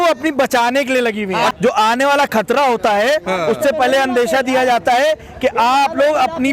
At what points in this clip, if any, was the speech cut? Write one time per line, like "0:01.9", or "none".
0:01.5